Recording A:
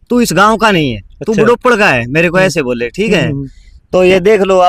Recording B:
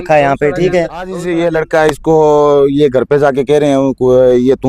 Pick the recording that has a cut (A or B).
B